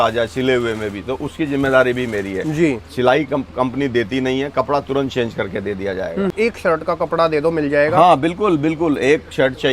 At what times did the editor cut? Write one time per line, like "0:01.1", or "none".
0:06.3